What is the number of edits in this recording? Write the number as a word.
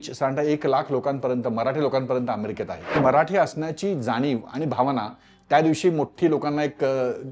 one